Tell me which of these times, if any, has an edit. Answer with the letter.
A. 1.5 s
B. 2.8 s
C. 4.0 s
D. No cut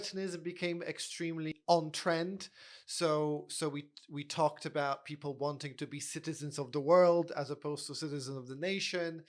A